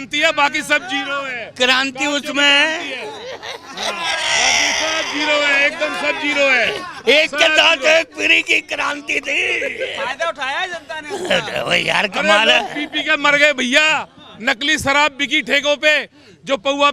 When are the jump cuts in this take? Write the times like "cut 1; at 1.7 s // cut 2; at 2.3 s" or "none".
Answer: none